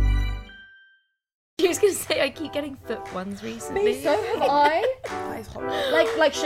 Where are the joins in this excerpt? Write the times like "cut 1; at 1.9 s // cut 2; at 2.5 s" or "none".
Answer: cut 1; at 1.5 s

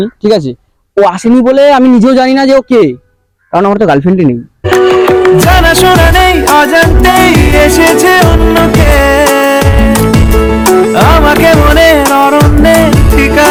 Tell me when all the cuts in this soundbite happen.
none

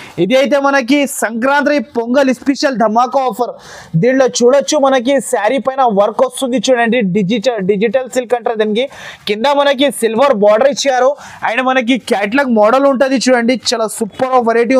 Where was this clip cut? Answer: none

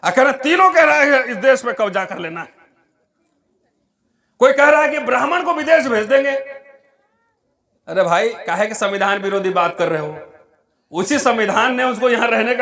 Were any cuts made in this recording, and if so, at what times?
none

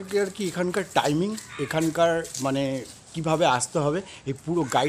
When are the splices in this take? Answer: none

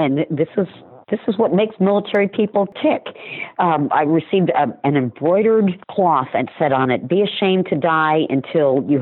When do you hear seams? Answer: cut 1; at 2.7 s // cut 2; at 5.8 s

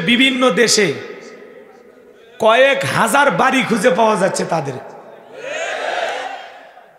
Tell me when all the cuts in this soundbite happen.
none

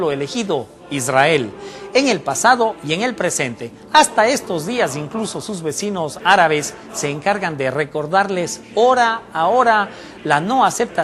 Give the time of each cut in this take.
none

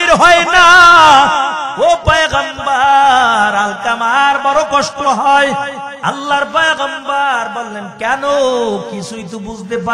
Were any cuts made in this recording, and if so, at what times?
cut 1; at 1.6 s // cut 2; at 5.9 s

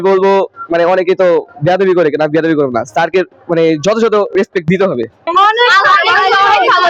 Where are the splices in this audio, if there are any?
none

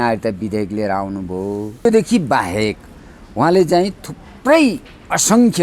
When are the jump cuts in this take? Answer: cut 1; at 1.9 s

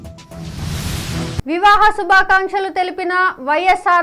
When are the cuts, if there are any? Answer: cut 1; at 1.4 s

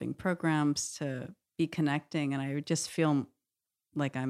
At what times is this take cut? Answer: cut 1; at 1.4 s

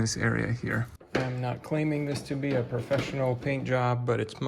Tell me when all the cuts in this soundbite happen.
cut 1; at 1.0 s

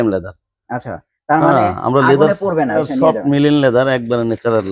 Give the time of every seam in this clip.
cut 1; at 2.8 s

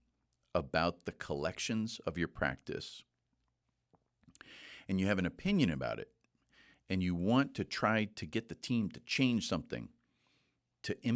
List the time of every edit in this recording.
none

